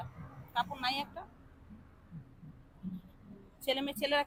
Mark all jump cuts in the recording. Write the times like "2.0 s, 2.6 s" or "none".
none